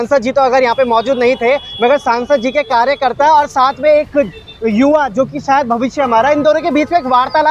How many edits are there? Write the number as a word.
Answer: zero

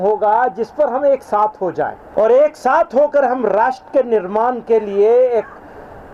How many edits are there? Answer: one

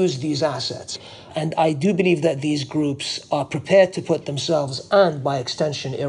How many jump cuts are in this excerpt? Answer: one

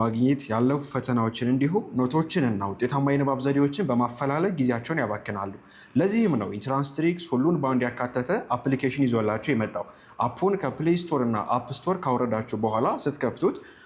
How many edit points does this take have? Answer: zero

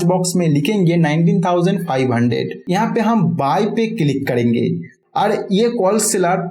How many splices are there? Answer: two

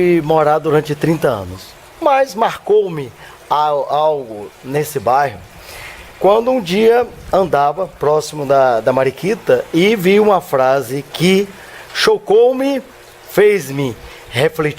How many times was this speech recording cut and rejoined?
one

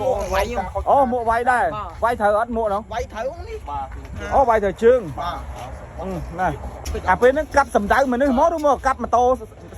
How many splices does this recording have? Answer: one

